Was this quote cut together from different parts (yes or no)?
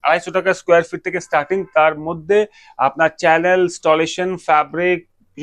no